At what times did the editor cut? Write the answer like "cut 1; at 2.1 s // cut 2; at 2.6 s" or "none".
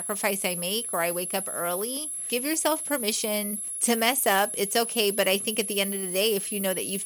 cut 1; at 2.3 s // cut 2; at 3.6 s